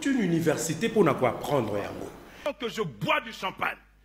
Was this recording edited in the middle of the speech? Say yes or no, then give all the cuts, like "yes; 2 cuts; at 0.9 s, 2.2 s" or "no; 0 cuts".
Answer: yes; 1 cut; at 2.5 s